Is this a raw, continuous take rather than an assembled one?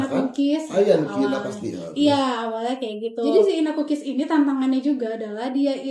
no; 1 cut; at 3.2 s

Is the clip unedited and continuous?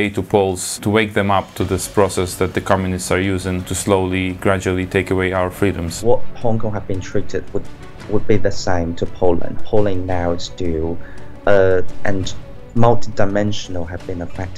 no; 4 cuts; at 0.8 s, 3.7 s, 6.0 s, 9.6 s

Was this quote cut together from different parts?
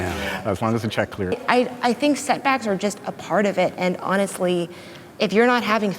yes; 1 cut; at 1.4 s

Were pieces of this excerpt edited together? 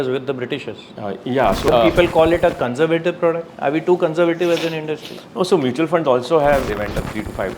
yes; 2 cuts; at 1.7 s, 6.7 s

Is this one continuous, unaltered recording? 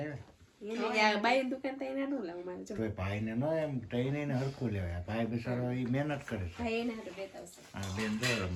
yes; 0 cuts

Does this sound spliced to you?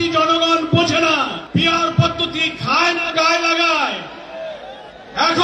yes; 1 cut; at 1.4 s

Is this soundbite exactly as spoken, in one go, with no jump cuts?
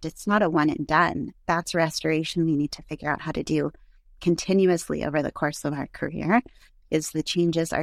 yes; 0 cuts

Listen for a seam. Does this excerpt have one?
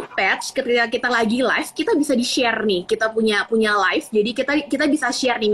no; 0 cuts

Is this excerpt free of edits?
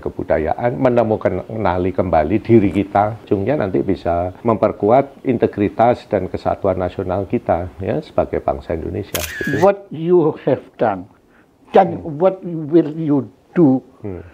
no; 4 cuts; at 3.2 s, 4.3 s, 5.1 s, 9.4 s

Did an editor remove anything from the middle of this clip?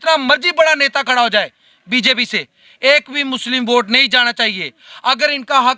no; 0 cuts

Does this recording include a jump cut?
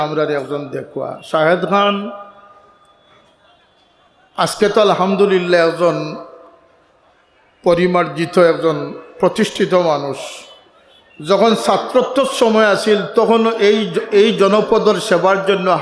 no; 0 cuts

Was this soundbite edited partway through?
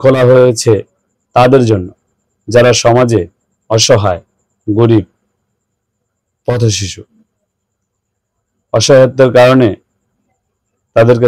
no; 0 cuts

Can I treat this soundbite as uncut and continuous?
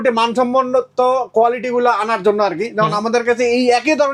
yes; 0 cuts

